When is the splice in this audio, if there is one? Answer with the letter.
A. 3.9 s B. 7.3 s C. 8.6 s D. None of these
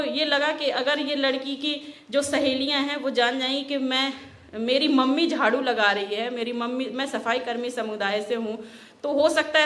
D